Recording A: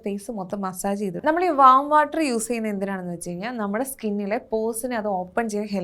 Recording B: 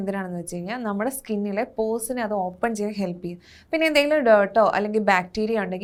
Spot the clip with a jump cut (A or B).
A